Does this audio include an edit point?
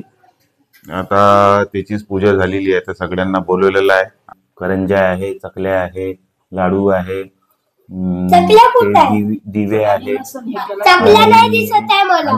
yes; 1 cut; at 4.3 s

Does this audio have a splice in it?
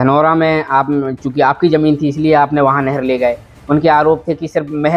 no; 0 cuts

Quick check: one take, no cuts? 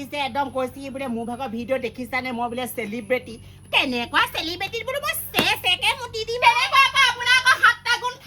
yes; 0 cuts

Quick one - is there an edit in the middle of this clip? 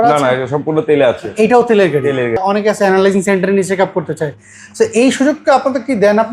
yes; 1 cut; at 2.4 s

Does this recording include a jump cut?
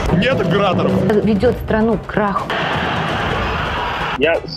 no; 0 cuts

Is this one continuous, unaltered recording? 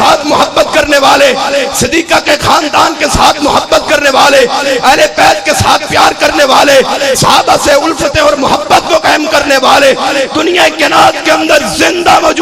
yes; 0 cuts

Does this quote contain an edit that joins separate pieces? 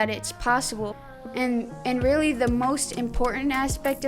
yes; 1 cut; at 0.9 s

